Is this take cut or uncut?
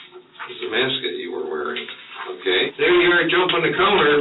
cut